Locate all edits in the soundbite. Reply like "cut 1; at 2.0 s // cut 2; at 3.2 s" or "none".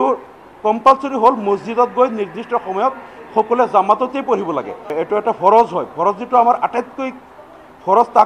cut 1; at 4.9 s